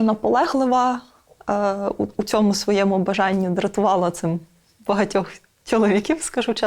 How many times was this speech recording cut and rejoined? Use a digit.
0